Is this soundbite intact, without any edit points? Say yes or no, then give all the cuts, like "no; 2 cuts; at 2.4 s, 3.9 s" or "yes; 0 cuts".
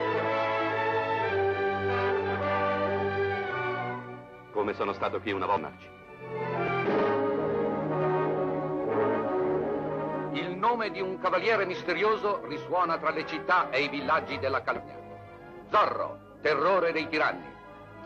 no; 1 cut; at 14.8 s